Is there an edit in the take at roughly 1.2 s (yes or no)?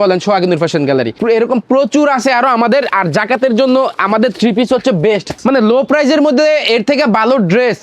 yes